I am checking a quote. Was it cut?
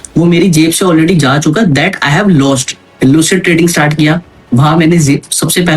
yes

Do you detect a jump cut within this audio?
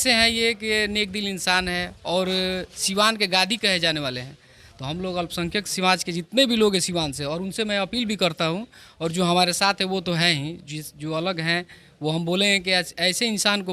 no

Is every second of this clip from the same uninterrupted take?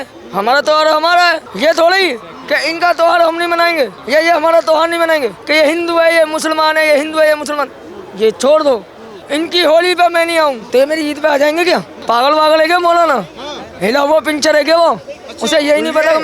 no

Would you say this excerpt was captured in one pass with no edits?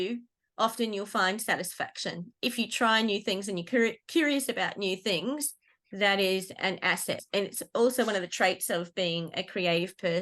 no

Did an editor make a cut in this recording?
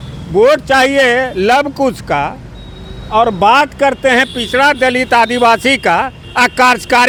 no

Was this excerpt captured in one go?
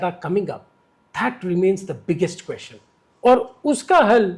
yes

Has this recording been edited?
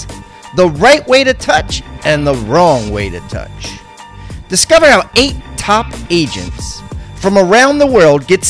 no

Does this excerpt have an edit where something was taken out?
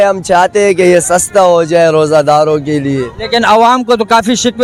no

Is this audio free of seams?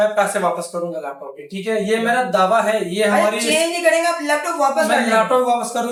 yes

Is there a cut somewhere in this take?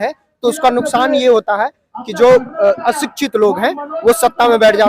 no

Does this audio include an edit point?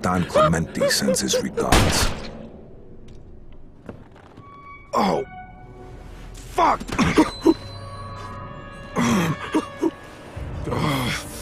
no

